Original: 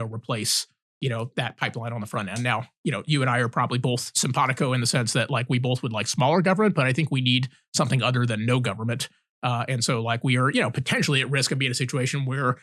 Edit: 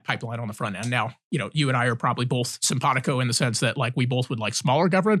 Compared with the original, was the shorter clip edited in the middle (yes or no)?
no